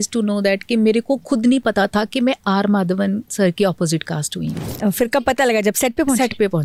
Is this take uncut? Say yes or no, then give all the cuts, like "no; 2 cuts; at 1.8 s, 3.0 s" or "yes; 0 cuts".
yes; 0 cuts